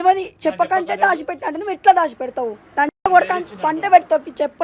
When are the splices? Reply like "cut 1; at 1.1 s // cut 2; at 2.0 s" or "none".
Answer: none